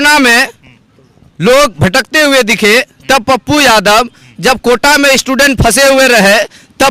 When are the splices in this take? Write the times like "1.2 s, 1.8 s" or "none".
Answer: none